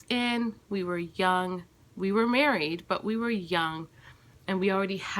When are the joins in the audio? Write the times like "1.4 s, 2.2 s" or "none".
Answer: none